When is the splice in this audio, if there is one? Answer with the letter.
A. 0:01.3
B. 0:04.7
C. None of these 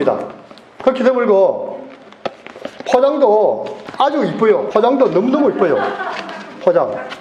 B